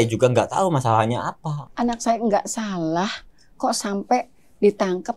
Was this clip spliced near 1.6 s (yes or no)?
yes